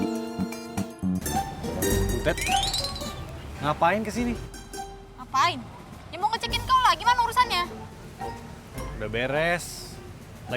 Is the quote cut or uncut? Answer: cut